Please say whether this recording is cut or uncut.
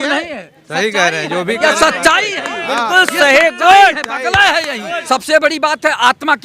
cut